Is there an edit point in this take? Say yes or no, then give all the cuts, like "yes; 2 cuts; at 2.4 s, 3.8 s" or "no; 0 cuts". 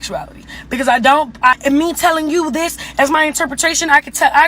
yes; 1 cut; at 1.6 s